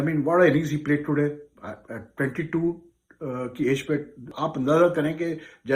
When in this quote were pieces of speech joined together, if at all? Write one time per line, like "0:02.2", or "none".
0:04.2